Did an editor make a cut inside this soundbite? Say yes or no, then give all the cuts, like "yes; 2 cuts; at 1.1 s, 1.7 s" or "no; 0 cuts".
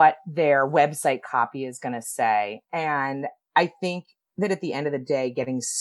no; 0 cuts